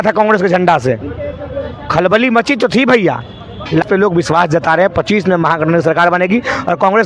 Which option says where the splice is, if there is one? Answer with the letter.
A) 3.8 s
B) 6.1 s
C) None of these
A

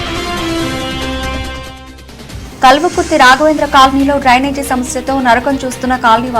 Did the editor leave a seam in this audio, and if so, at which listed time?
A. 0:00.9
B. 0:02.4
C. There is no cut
B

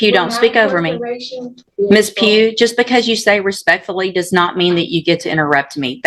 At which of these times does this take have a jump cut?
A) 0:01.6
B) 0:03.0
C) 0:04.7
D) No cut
A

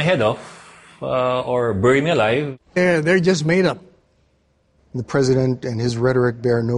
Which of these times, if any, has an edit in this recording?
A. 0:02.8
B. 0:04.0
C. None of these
A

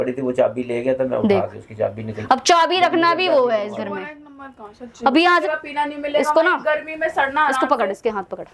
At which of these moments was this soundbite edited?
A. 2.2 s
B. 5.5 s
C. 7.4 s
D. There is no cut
B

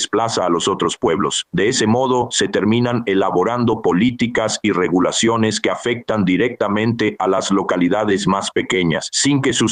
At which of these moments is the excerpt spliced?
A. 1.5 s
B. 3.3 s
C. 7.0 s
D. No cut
D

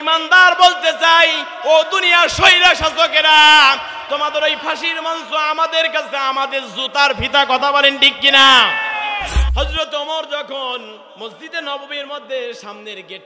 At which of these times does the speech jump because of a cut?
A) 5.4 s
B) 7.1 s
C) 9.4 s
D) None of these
C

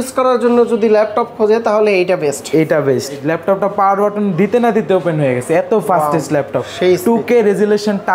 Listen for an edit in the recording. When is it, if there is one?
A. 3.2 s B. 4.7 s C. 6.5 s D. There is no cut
A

